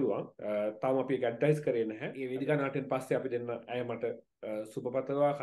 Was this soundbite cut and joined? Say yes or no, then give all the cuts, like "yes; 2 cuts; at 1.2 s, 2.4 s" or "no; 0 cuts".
yes; 1 cut; at 2.2 s